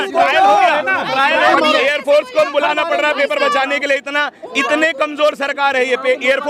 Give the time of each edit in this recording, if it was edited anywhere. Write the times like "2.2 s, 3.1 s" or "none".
1.5 s